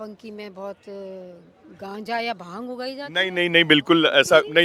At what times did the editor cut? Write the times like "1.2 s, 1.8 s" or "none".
none

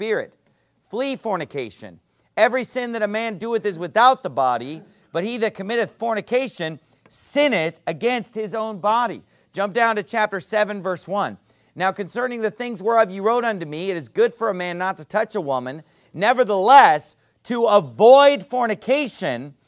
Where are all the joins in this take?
8.8 s

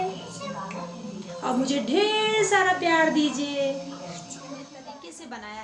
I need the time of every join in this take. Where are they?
4.7 s

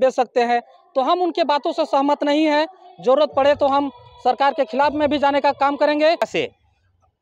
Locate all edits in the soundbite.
6.3 s

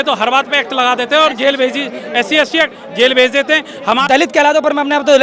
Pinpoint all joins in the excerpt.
3.9 s

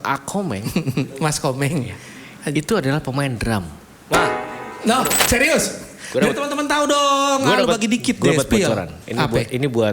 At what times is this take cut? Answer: 5.2 s

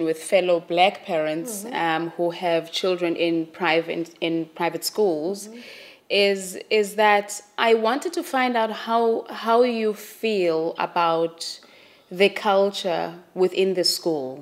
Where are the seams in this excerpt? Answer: none

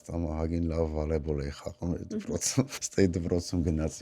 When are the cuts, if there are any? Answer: 2.8 s

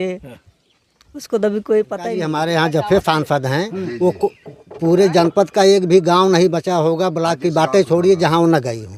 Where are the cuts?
2.3 s

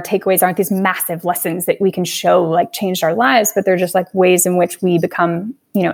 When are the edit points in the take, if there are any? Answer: none

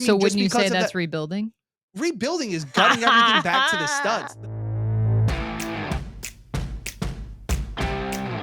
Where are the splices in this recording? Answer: 4.3 s

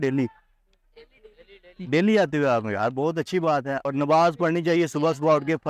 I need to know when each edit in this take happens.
3.9 s

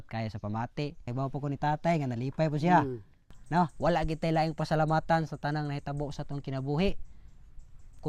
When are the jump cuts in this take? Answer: 1.1 s, 3.7 s

